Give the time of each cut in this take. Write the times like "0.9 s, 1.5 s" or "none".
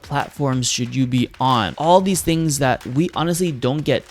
1.7 s, 2.9 s